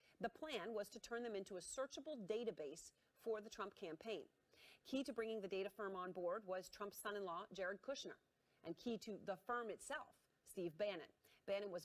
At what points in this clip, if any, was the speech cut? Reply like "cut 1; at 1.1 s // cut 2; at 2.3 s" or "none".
cut 1; at 1.5 s